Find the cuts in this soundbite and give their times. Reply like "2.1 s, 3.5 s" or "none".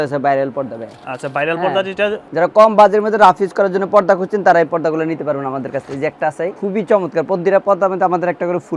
2.2 s, 6.6 s